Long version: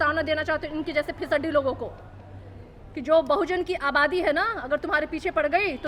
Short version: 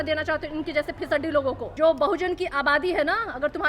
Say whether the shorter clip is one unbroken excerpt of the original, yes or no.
no